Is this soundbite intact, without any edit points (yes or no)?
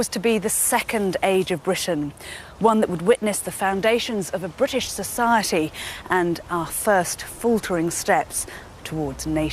no